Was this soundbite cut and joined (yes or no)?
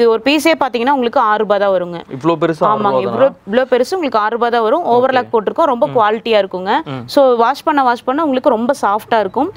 no